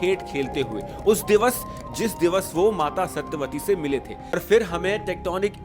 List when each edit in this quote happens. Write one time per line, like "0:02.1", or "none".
0:04.4